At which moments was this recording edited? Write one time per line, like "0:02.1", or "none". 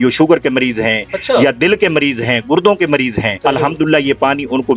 0:03.3